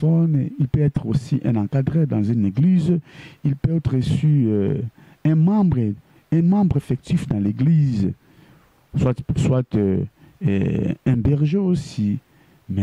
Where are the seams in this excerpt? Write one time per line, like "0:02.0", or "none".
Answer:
none